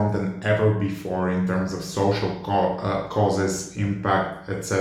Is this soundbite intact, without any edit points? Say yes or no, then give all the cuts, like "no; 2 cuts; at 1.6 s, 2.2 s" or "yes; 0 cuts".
yes; 0 cuts